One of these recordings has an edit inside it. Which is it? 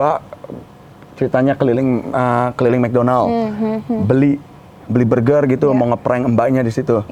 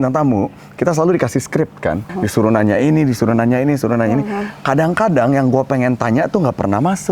second; 1 cut; at 2.1 s

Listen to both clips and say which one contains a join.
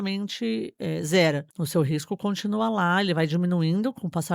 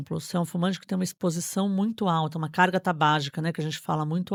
first; 1 cut; at 1.5 s

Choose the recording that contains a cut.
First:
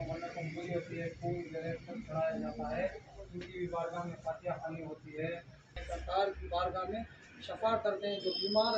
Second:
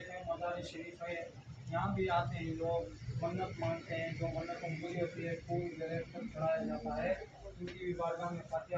first; 1 cut; at 5.7 s

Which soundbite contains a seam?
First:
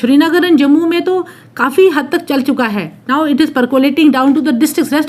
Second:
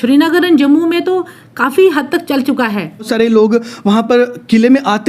second; 1 cut; at 3.1 s

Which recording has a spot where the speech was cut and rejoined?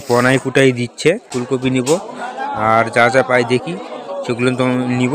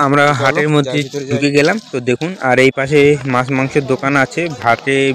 first; 1 cut; at 1.3 s

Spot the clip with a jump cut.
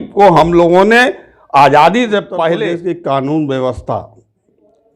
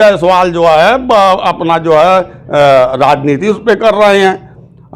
first; 1 cut; at 2.6 s

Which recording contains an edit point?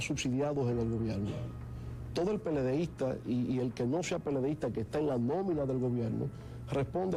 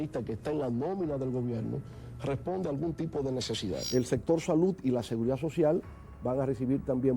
second; 1 cut; at 3.8 s

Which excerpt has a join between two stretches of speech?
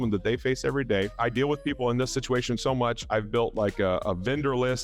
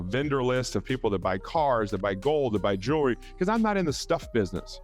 first; 2 cuts; at 1.1 s, 3.0 s

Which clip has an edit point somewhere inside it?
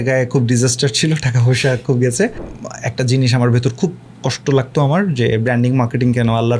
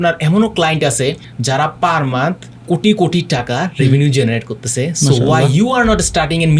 first; 1 cut; at 2.4 s

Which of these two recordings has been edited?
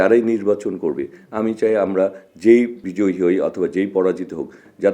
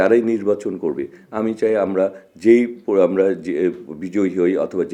first; 1 cut; at 2.8 s

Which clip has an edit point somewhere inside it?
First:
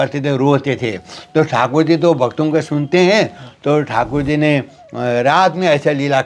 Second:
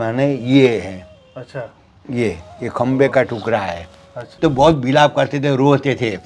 second; 1 cut; at 4.2 s

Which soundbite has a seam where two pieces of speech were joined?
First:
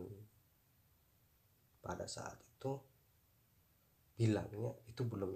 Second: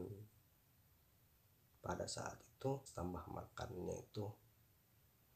second; 1 cut; at 2.9 s

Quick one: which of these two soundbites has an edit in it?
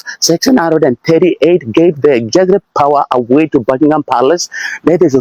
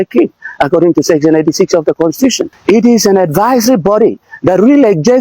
second; 1 cut; at 2.5 s

